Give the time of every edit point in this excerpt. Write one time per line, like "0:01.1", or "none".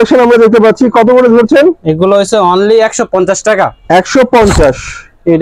none